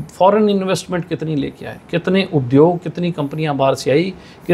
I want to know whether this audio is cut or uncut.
uncut